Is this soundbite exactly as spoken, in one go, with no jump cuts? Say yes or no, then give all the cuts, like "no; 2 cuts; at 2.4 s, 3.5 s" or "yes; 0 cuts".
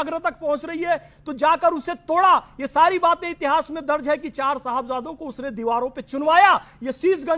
yes; 0 cuts